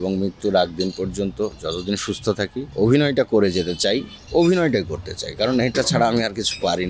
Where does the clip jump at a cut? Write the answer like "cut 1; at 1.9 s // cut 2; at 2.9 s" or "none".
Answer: cut 1; at 1.6 s // cut 2; at 2.7 s // cut 3; at 4.2 s